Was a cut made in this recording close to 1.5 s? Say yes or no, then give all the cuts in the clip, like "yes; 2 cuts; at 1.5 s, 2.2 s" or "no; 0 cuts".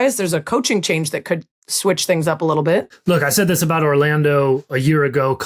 no; 1 cut; at 2.9 s